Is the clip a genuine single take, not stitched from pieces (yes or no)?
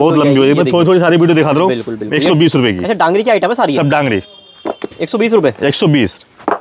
yes